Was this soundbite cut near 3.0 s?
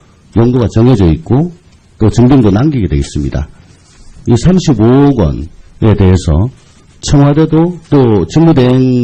yes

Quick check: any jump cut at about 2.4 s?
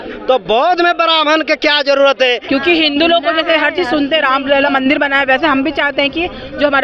yes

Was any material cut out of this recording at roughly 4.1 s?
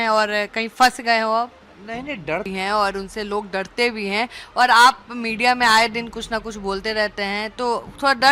no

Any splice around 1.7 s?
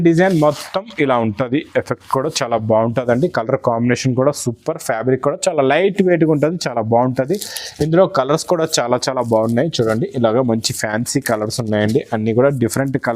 no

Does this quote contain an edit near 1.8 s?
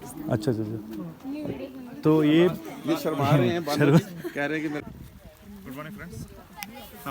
no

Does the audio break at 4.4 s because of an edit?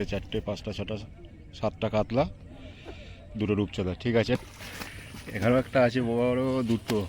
yes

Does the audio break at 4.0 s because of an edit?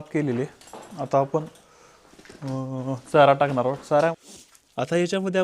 yes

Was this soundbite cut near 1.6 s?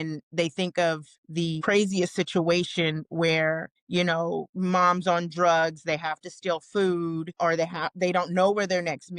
yes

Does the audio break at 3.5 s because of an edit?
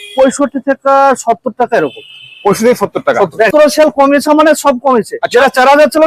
yes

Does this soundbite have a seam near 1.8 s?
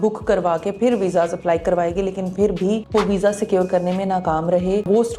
no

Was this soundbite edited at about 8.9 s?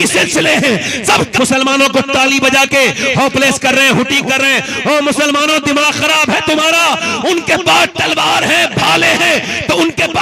no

